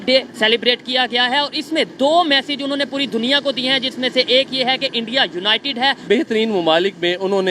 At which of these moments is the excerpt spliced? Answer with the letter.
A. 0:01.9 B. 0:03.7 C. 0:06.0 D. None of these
C